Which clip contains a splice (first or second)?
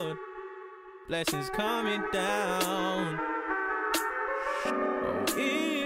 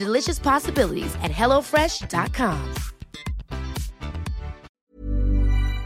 second